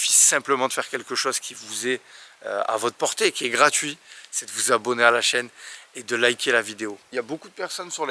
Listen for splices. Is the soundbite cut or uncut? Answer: cut